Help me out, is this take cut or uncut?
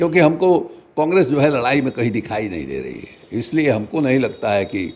uncut